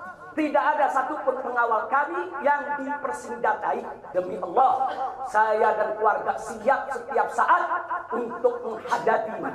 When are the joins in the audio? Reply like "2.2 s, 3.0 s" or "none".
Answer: 4.0 s